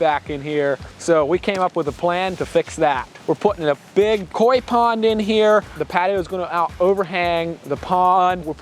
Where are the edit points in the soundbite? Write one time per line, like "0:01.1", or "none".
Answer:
0:04.3
0:05.7